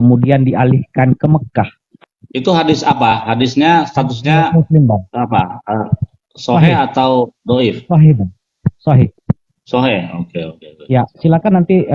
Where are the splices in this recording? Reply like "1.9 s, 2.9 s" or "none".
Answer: 9.2 s, 11.1 s